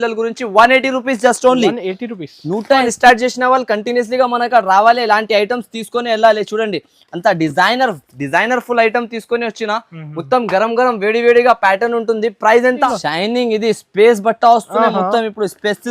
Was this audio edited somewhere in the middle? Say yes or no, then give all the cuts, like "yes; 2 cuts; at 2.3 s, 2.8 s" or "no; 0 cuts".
yes; 2 cuts; at 2.9 s, 12.9 s